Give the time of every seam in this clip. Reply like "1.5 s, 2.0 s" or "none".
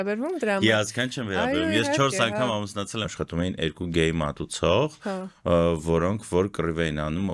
3.1 s